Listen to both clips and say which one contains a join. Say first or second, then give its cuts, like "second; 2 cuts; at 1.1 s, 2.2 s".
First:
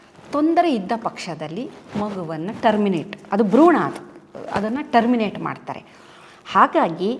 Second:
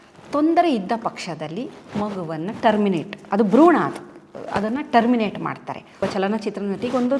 second; 1 cut; at 6.0 s